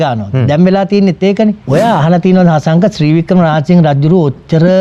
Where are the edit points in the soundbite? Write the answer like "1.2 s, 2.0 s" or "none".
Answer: 1.6 s